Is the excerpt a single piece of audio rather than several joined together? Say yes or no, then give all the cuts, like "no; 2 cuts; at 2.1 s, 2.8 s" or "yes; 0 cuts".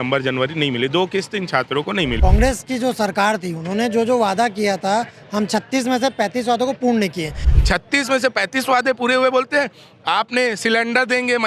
no; 2 cuts; at 2.2 s, 7.5 s